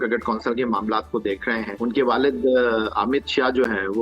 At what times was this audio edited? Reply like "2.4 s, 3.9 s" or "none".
1.7 s